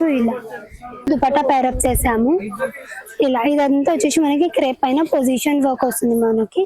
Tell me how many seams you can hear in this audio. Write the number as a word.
one